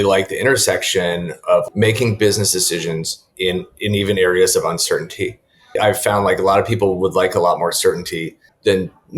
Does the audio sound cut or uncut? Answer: cut